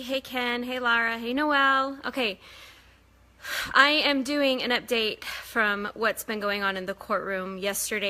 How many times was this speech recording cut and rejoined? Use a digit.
1